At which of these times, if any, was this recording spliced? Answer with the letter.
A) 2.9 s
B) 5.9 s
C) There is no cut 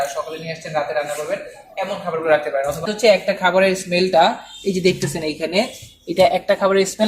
A